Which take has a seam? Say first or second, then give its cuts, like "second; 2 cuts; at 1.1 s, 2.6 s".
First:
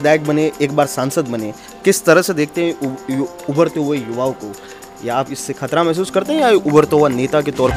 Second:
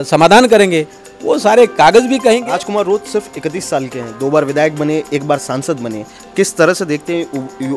second; 1 cut; at 2.4 s